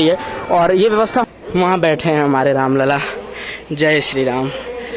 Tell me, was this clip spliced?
yes; 1 cut; at 1.2 s

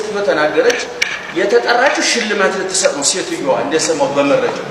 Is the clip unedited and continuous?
yes; 0 cuts

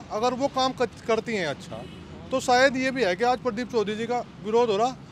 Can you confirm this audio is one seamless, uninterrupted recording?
yes; 0 cuts

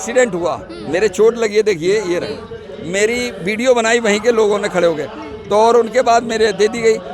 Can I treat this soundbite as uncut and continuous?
yes; 0 cuts

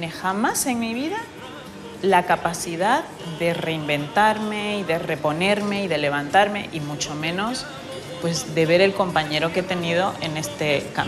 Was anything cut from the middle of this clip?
no; 0 cuts

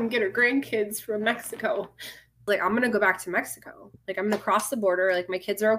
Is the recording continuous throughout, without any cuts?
no; 1 cut; at 2.5 s

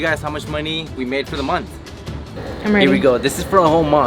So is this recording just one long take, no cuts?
no; 1 cut; at 2.2 s

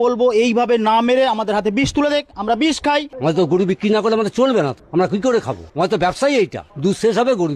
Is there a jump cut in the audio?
yes; 4 cuts; at 3.1 s, 4.8 s, 5.6 s, 6.6 s

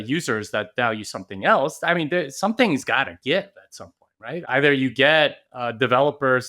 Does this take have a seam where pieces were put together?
yes; 1 cut; at 4.5 s

